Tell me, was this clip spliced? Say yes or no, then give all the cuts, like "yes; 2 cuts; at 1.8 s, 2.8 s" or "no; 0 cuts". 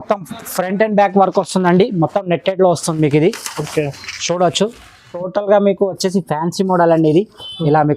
yes; 1 cut; at 5.2 s